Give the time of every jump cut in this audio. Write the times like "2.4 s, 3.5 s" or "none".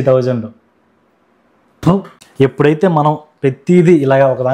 2.2 s

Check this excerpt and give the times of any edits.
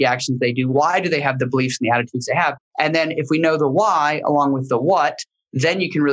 2.6 s

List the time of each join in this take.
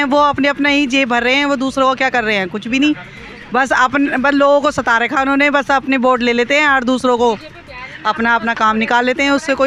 none

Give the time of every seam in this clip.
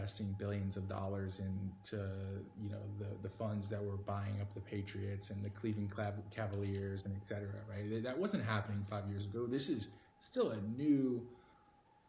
none

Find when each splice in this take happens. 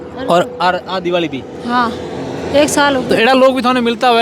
none

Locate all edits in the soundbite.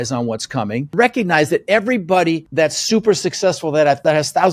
0.9 s

